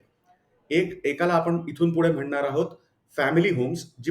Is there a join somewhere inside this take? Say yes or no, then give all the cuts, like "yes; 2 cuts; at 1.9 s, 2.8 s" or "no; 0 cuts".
no; 0 cuts